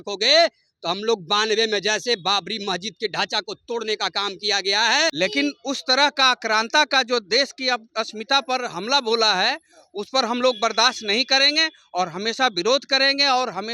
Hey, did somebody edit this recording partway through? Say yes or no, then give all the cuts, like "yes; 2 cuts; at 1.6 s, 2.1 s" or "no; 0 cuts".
yes; 1 cut; at 5.1 s